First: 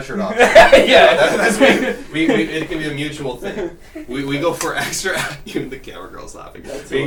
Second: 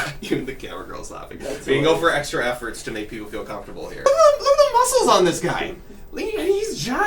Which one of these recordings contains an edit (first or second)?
second